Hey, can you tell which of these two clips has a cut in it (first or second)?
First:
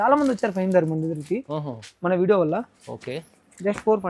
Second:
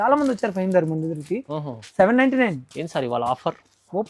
second